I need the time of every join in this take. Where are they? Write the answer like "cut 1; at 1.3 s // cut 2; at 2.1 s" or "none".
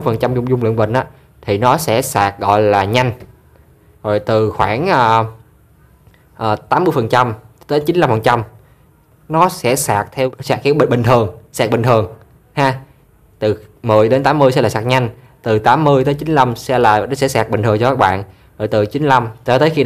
cut 1; at 10.3 s